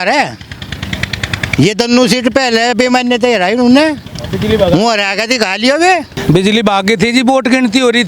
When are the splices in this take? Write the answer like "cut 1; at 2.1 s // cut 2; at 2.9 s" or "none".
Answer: cut 1; at 6.2 s